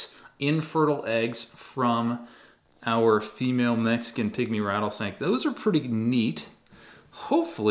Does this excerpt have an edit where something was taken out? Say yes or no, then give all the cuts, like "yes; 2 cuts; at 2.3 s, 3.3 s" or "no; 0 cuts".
no; 0 cuts